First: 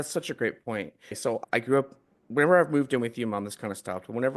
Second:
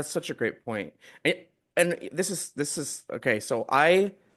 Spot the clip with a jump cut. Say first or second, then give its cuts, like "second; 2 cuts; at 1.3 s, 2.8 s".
first; 1 cut; at 1.3 s